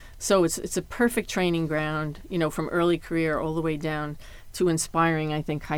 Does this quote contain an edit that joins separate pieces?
no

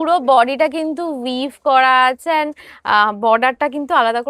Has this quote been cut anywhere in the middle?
no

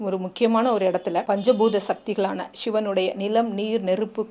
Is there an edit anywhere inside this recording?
yes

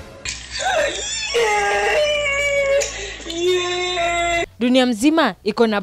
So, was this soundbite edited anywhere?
yes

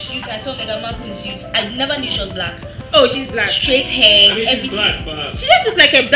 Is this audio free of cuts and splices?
yes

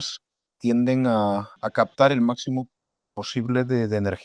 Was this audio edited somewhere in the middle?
yes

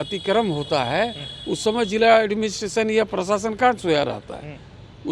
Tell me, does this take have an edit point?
no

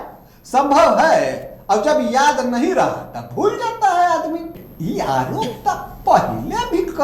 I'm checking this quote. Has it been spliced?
yes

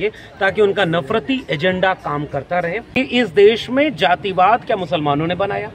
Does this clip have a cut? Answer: yes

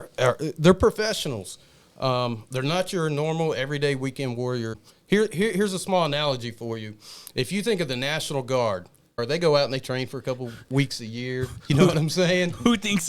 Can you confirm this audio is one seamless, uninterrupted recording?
no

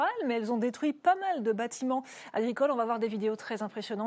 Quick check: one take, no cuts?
no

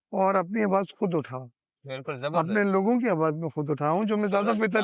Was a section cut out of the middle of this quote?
no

